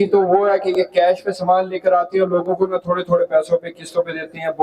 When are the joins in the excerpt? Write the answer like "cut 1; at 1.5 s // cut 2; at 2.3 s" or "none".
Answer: none